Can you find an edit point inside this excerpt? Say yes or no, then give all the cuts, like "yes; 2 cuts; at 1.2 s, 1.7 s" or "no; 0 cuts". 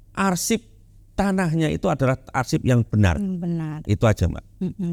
no; 0 cuts